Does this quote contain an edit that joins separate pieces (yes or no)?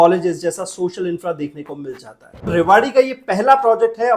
yes